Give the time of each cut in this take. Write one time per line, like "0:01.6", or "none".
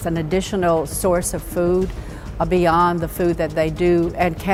none

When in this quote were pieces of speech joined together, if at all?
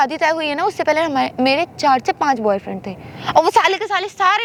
none

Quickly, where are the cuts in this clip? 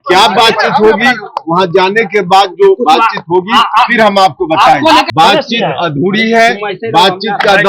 0:05.1

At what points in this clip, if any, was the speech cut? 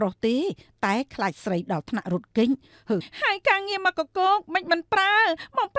0:03.1

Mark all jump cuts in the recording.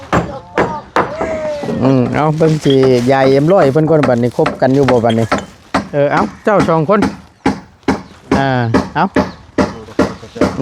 0:01.7

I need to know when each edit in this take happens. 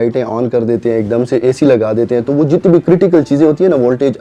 none

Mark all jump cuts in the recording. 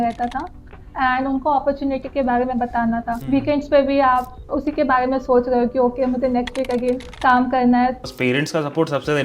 0:03.2
0:04.4
0:07.1
0:08.0

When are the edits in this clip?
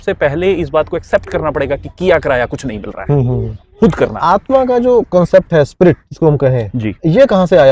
0:04.2

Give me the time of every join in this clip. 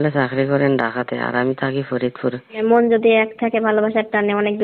0:02.6

